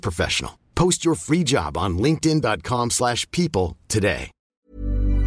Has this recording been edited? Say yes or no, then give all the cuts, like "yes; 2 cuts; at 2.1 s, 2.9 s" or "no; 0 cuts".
yes; 1 cut; at 4.4 s